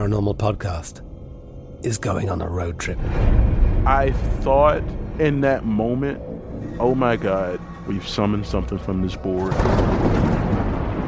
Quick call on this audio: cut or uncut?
uncut